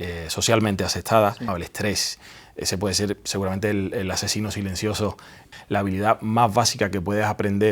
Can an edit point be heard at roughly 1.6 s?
yes; 2 cuts; at 1.6 s, 5.4 s

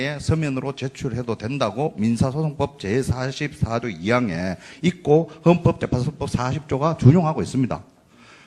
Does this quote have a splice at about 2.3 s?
no; 1 cut; at 6.8 s

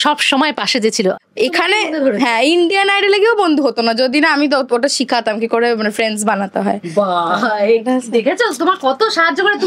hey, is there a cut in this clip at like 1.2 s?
yes; 1 cut; at 1.2 s

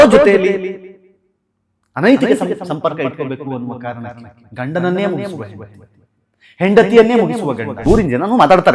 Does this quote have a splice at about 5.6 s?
no; 1 cut; at 7.7 s

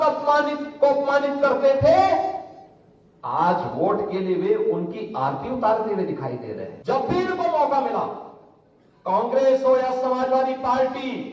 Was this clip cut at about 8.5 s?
no; 1 cut; at 6.7 s

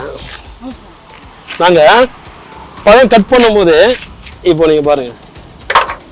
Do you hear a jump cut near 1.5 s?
no; 0 cuts

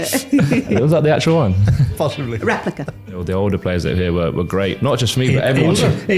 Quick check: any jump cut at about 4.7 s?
no; 1 cut; at 3.1 s

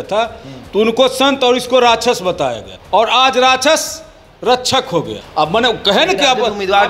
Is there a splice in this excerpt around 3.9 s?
no; 2 cuts; at 2.7 s, 5.2 s

